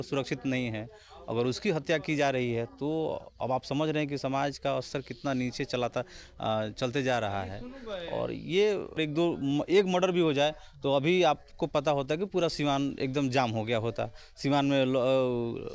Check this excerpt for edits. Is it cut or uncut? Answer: cut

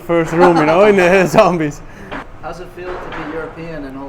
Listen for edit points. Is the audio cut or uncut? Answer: cut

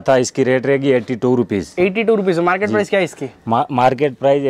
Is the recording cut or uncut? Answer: uncut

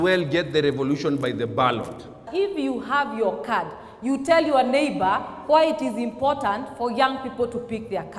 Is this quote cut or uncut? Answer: cut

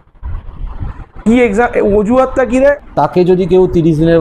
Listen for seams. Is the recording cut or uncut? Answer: cut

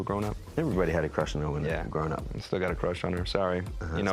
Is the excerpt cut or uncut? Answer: uncut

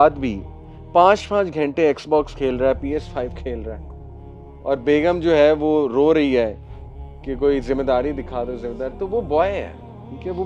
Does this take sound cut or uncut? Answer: uncut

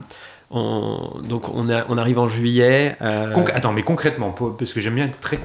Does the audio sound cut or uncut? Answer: uncut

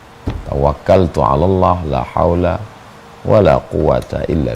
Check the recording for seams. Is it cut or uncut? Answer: uncut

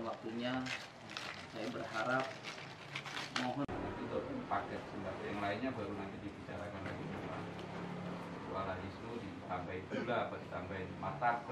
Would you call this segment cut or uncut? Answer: cut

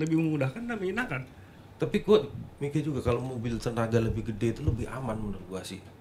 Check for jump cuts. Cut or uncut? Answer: cut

